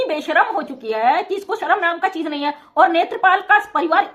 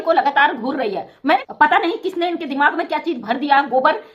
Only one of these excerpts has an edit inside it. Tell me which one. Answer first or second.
second